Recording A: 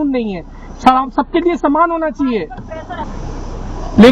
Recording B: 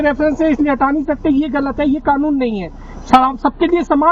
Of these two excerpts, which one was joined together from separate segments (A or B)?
A